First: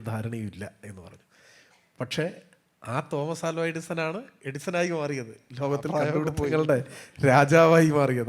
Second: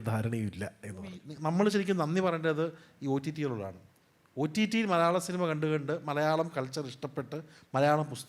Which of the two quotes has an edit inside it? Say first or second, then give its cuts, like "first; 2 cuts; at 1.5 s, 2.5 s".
second; 1 cut; at 1.3 s